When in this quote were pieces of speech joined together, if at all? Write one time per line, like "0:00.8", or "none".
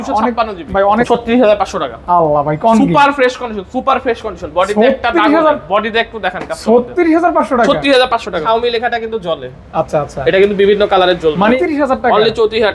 0:01.0
0:08.4
0:11.4

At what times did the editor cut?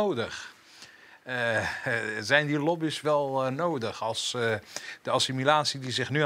none

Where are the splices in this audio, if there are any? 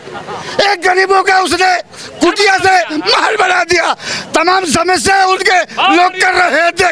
none

